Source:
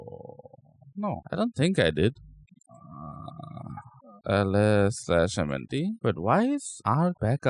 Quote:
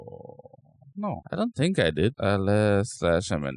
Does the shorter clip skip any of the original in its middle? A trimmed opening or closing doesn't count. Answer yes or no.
yes